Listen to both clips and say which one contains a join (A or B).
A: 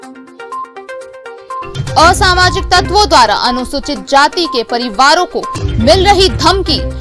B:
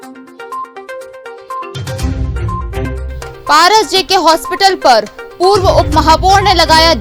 A